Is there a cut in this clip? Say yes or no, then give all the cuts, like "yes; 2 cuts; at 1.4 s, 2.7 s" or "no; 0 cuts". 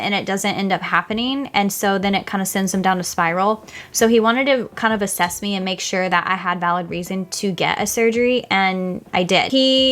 no; 0 cuts